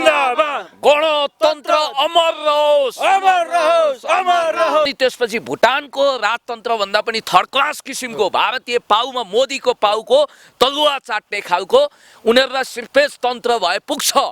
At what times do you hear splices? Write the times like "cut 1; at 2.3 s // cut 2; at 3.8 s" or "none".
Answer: cut 1; at 4.9 s

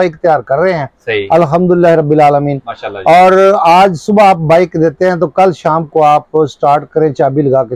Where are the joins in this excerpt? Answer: none

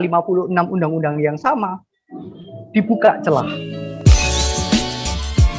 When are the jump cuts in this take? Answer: cut 1; at 3.7 s

